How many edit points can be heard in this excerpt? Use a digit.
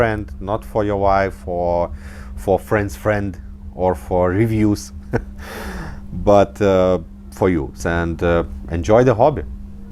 1